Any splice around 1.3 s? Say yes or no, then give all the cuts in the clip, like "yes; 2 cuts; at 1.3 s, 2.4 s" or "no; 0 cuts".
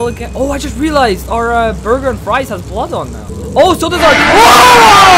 no; 1 cut; at 3.2 s